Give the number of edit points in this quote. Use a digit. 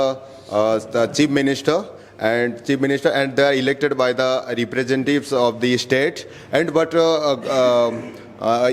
0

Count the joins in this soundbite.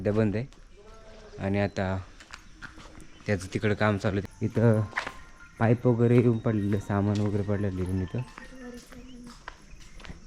1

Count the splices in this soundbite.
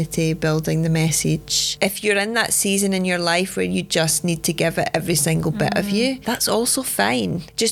2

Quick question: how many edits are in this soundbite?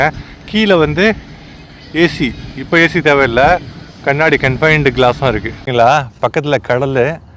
1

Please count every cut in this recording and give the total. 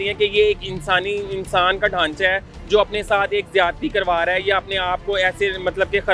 0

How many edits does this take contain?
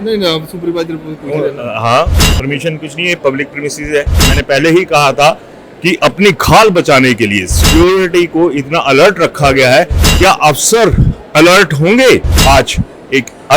2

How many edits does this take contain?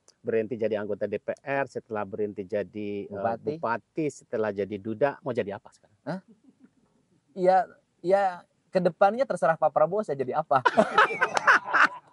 0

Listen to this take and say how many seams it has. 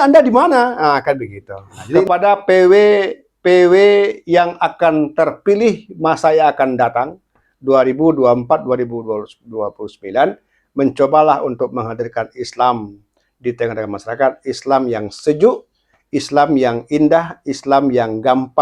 1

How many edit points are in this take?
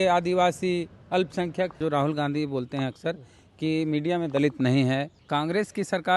2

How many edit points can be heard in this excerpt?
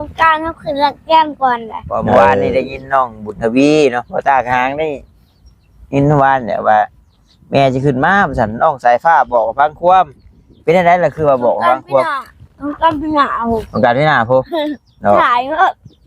1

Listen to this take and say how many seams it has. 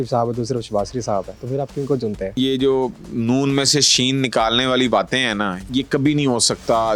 3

